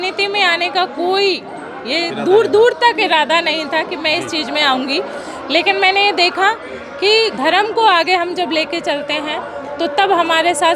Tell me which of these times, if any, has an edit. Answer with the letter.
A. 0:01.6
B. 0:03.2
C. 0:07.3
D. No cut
C